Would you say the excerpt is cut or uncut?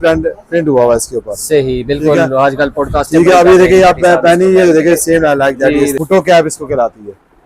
cut